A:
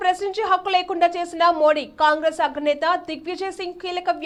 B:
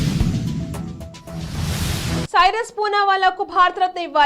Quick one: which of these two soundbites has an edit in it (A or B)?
B